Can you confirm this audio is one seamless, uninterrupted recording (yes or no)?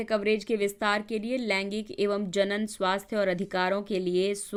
yes